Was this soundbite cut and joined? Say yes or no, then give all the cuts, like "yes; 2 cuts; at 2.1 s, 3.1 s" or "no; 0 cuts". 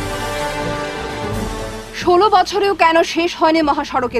yes; 1 cut; at 1.4 s